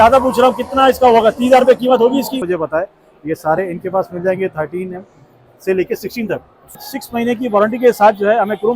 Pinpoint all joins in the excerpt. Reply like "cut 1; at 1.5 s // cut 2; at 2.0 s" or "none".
cut 1; at 2.4 s // cut 2; at 6.8 s